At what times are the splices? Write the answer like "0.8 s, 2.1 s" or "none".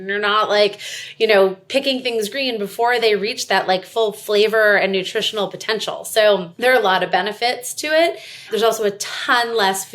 6.5 s, 8.5 s